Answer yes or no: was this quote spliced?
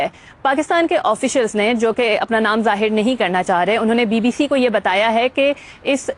no